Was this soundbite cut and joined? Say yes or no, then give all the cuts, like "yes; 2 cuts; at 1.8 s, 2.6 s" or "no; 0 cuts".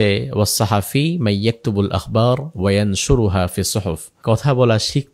yes; 1 cut; at 4.1 s